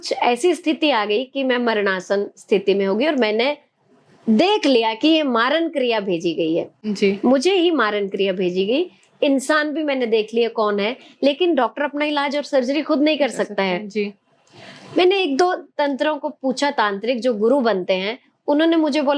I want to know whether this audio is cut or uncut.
uncut